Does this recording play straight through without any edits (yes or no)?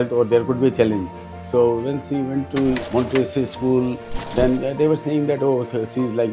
no